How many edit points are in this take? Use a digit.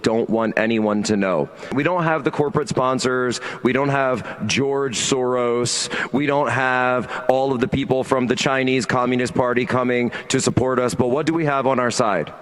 1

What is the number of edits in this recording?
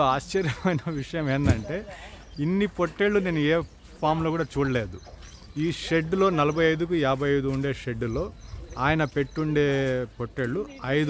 0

